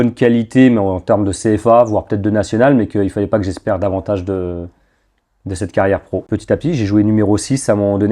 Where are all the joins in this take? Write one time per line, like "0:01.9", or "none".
0:06.3